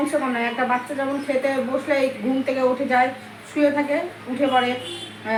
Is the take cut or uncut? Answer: uncut